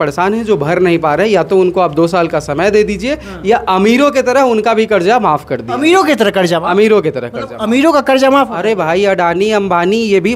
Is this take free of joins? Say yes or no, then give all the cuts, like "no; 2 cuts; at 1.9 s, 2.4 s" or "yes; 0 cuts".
yes; 0 cuts